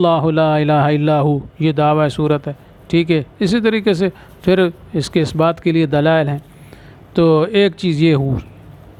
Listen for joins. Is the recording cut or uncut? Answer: uncut